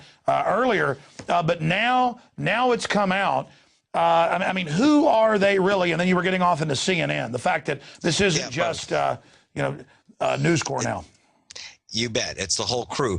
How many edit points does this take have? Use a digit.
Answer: 1